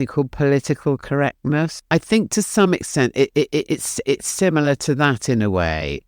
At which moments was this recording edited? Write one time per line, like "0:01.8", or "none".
0:01.8